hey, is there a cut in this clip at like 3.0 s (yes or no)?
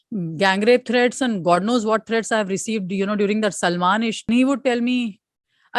no